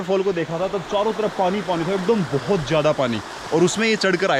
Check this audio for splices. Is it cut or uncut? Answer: uncut